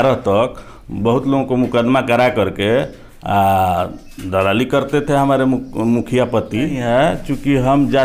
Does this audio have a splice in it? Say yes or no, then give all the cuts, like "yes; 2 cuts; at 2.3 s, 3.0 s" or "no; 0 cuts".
yes; 1 cut; at 6.8 s